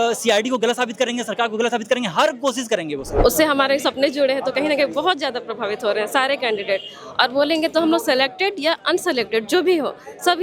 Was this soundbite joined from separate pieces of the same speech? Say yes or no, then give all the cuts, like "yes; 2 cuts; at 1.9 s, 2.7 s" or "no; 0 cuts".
yes; 1 cut; at 3.1 s